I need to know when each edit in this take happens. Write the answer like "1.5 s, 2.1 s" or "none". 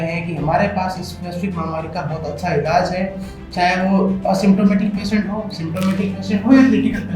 none